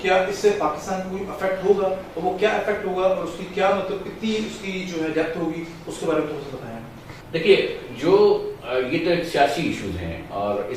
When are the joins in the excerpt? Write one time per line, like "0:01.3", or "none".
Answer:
none